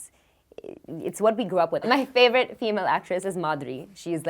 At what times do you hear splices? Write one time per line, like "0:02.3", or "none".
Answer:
0:01.8